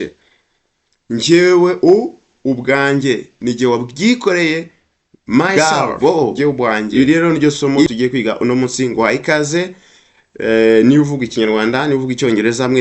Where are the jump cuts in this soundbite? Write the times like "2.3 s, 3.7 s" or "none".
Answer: 5.6 s